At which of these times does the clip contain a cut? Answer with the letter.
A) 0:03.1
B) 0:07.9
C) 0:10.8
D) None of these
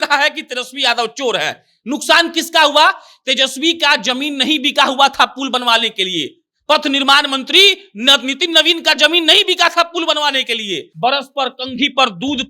C